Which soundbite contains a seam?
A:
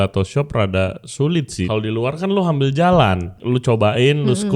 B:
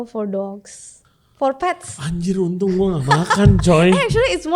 A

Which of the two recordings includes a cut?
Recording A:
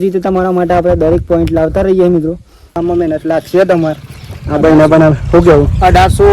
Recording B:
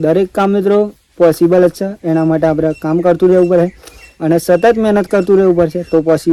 A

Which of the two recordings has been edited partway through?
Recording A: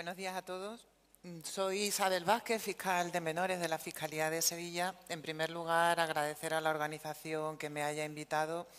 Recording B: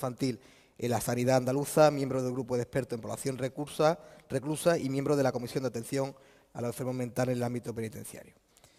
A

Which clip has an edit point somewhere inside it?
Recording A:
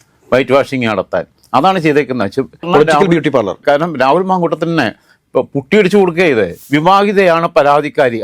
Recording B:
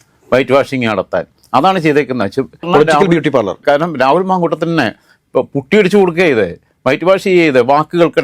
A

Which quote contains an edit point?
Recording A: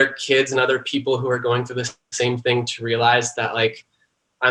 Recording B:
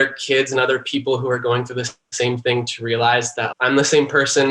B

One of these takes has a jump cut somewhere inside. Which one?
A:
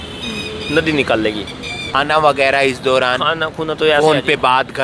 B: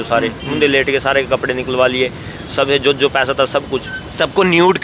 A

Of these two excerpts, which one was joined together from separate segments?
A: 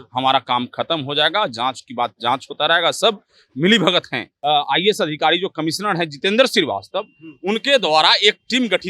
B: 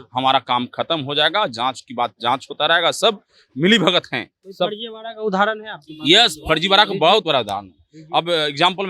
A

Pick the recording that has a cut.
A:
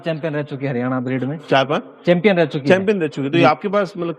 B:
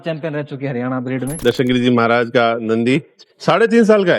B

